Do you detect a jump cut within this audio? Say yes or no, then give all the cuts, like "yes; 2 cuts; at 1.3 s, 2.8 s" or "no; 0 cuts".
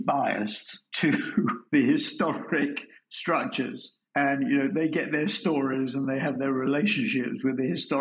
no; 0 cuts